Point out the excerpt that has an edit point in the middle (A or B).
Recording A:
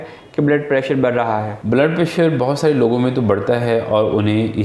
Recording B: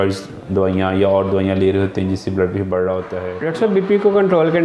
B